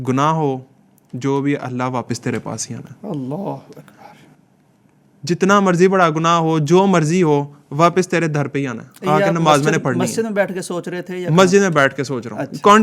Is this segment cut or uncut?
uncut